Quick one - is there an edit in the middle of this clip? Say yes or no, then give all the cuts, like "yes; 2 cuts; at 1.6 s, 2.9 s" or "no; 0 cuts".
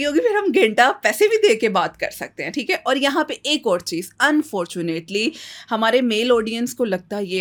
no; 0 cuts